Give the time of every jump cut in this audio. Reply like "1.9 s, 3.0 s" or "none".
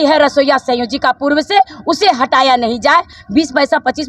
3.2 s